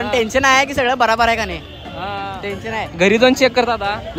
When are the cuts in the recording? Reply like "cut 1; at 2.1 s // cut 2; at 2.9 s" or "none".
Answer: none